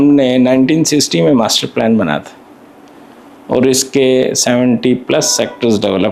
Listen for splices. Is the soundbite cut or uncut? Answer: uncut